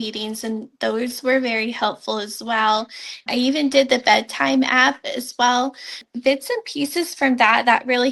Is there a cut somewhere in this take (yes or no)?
yes